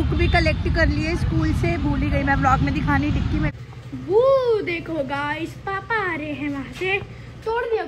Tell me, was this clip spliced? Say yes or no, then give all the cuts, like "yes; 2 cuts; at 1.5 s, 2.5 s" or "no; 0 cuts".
yes; 1 cut; at 3.5 s